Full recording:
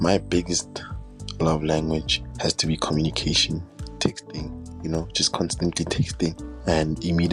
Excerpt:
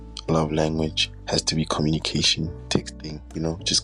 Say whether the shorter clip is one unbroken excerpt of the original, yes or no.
no